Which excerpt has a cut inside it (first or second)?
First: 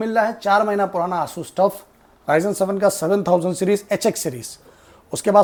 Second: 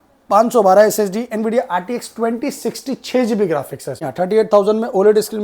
second